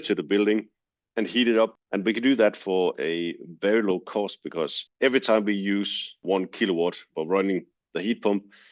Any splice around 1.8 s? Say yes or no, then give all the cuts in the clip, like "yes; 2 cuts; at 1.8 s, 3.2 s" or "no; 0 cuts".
yes; 3 cuts; at 1.8 s, 6.2 s, 7.1 s